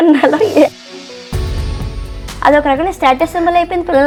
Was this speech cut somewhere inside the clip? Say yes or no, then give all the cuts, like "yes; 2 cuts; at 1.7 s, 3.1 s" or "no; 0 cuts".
no; 0 cuts